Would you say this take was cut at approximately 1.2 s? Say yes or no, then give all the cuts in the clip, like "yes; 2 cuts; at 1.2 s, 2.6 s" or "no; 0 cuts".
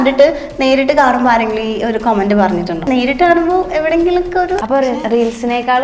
no; 2 cuts; at 2.8 s, 4.6 s